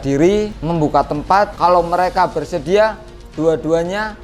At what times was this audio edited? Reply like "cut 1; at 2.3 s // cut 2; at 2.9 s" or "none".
cut 1; at 1.1 s